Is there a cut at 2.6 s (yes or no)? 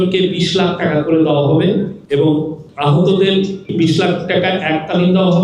yes